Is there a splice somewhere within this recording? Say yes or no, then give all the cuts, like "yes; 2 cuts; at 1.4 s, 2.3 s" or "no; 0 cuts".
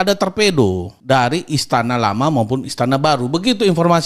yes; 1 cut; at 0.9 s